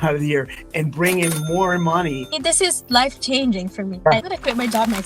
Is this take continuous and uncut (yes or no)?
no